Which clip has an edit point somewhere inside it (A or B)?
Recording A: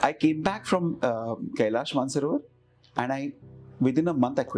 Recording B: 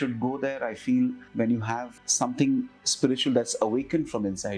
B